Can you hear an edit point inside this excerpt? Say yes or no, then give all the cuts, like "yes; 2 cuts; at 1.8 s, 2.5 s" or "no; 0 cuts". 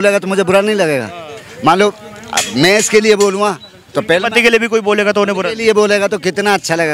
no; 0 cuts